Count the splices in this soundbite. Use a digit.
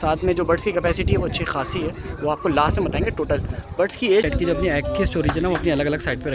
1